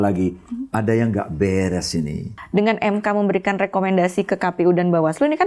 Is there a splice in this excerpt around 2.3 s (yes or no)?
yes